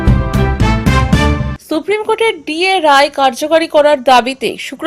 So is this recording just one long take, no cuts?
no; 1 cut; at 1.5 s

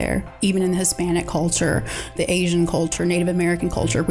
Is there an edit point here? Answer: yes; 2 cuts; at 2.1 s, 2.9 s

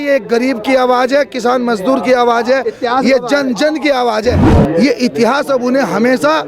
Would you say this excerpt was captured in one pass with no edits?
no; 1 cut; at 4.5 s

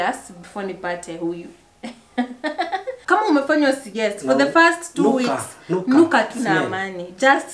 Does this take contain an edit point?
yes; 1 cut; at 3.0 s

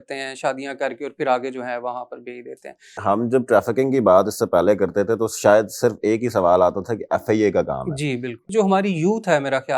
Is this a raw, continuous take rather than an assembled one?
no; 2 cuts; at 3.0 s, 8.5 s

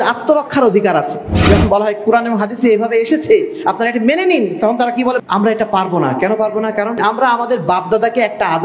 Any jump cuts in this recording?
yes; 3 cuts; at 1.5 s, 5.2 s, 7.0 s

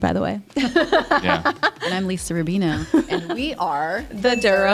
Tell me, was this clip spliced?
no; 0 cuts

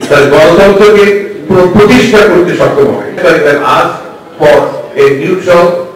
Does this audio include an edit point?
yes; 1 cut; at 3.2 s

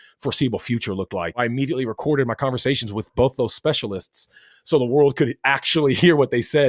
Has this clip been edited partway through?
yes; 1 cut; at 1.4 s

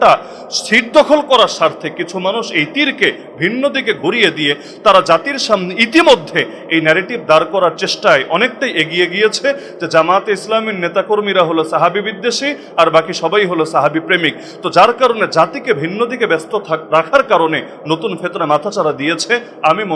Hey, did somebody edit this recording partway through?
no; 0 cuts

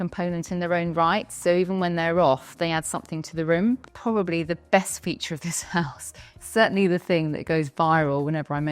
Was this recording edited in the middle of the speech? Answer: yes; 1 cut; at 3.9 s

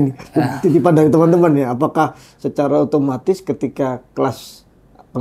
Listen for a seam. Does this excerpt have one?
no; 0 cuts

